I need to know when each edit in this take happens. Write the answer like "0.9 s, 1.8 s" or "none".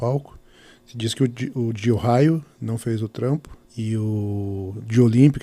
3.6 s

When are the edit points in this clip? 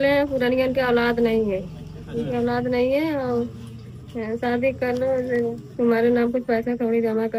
none

